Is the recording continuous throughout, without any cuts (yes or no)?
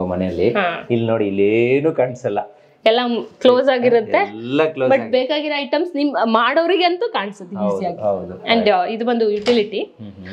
yes